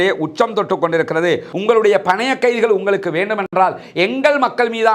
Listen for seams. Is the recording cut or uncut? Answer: cut